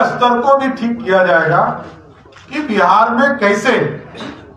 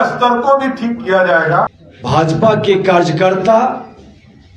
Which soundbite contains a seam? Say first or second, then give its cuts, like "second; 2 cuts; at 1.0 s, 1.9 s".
second; 1 cut; at 1.9 s